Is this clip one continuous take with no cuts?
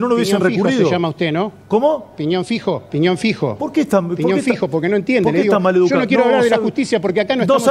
yes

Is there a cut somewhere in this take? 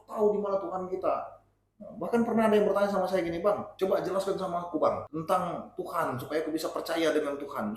yes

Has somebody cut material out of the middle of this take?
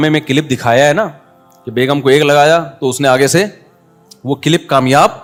no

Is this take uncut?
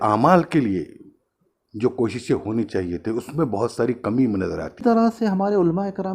no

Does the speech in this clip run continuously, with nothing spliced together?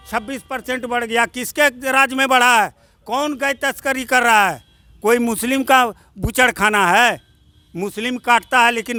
yes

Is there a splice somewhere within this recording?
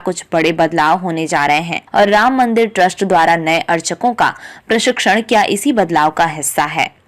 yes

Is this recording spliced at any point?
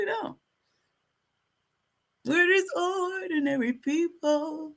no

